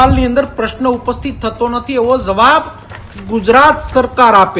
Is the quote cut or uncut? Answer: uncut